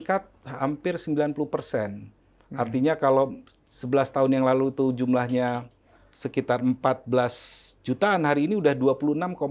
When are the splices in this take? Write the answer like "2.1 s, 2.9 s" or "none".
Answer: none